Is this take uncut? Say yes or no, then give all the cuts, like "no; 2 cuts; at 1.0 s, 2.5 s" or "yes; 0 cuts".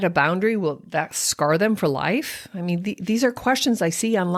yes; 0 cuts